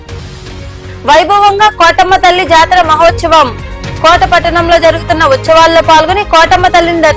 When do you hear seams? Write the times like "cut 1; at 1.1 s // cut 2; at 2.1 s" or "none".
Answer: cut 1; at 0.9 s